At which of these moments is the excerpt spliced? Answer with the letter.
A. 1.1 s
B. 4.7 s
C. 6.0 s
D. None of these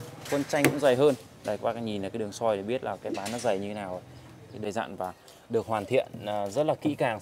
B